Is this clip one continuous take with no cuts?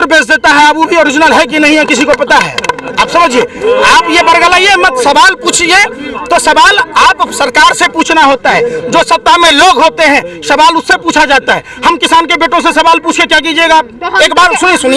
yes; 0 cuts

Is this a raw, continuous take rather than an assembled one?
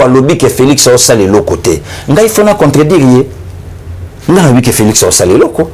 yes; 0 cuts

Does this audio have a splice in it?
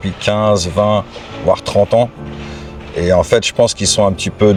no; 0 cuts

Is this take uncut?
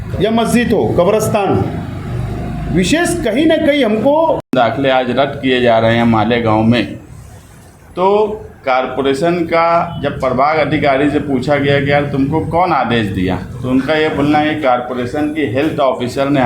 no; 1 cut; at 4.5 s

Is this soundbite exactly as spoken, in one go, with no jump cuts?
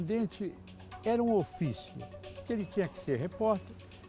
yes; 0 cuts

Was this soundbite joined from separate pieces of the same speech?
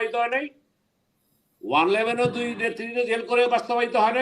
no; 0 cuts

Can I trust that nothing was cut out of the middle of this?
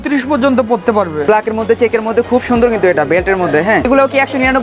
no; 2 cuts; at 1.2 s, 3.9 s

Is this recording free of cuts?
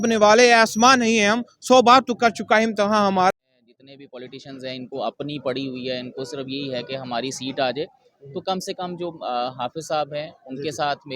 no; 1 cut; at 3.3 s

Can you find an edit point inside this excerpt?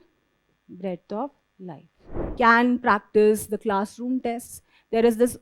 yes; 1 cut; at 2.1 s

